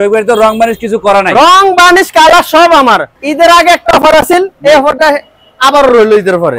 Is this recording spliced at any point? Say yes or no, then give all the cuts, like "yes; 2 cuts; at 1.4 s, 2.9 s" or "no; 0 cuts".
yes; 1 cut; at 3.1 s